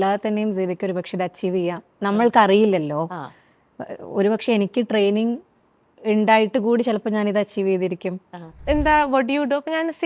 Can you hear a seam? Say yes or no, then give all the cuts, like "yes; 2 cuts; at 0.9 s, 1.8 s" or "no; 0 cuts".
yes; 1 cut; at 8.6 s